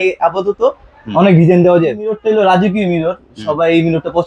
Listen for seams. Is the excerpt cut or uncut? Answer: cut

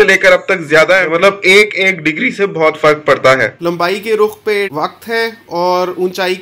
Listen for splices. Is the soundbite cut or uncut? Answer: cut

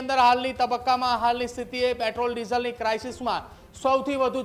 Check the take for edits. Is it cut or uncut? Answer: uncut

